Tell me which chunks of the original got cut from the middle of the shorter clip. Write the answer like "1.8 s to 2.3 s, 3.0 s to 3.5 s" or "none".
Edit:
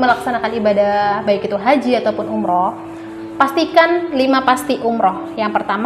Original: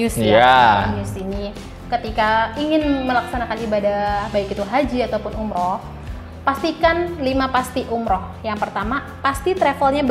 none